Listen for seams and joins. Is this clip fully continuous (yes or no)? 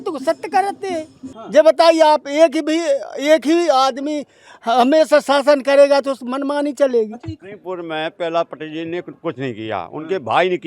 no